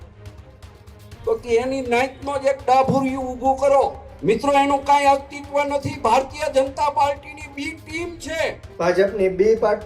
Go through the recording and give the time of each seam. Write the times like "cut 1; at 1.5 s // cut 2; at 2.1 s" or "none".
cut 1; at 4.1 s // cut 2; at 8.6 s